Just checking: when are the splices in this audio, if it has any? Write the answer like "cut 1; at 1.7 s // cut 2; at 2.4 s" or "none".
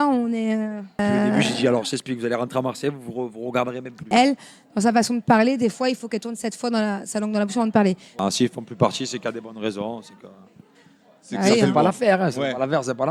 cut 1; at 1.0 s // cut 2; at 4.1 s // cut 3; at 8.1 s